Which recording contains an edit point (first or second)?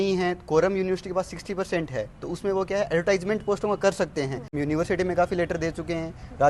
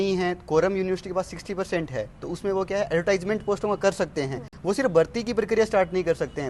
first